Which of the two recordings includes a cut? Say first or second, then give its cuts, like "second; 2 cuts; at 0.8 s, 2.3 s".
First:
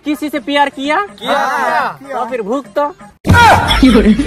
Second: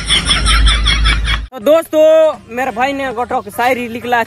second; 1 cut; at 1.4 s